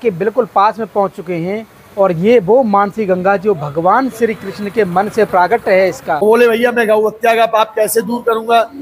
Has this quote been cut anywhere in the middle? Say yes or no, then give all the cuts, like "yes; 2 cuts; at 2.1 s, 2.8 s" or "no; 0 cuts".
yes; 1 cut; at 6.2 s